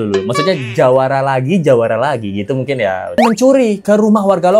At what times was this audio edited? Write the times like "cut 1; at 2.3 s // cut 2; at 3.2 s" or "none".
cut 1; at 3.2 s